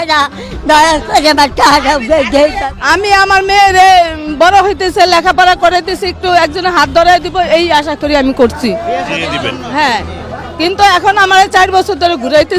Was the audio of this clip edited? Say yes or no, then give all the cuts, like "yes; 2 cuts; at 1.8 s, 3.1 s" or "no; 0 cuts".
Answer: yes; 1 cut; at 2.7 s